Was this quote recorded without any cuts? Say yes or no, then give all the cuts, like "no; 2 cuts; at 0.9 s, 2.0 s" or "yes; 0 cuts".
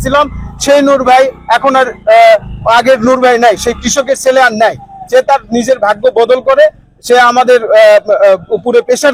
yes; 0 cuts